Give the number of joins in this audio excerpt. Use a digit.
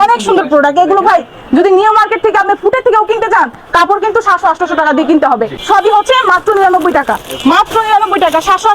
1